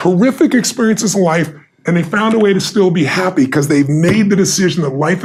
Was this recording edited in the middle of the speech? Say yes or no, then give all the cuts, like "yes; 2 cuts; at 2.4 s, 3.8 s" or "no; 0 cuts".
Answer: no; 0 cuts